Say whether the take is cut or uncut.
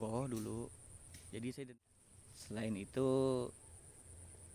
cut